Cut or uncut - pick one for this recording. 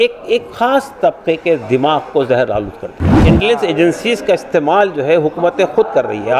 cut